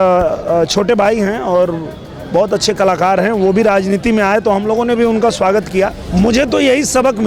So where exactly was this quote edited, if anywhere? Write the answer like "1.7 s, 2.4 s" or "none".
6.0 s